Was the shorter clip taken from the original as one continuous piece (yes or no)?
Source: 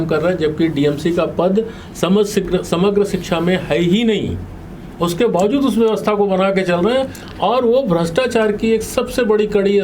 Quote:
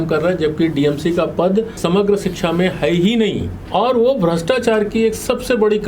no